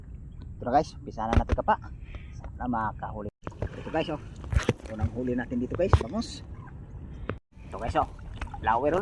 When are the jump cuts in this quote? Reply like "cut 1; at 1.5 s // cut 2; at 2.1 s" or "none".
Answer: cut 1; at 3.3 s // cut 2; at 7.4 s